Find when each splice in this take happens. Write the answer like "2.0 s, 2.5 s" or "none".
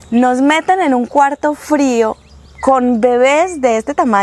none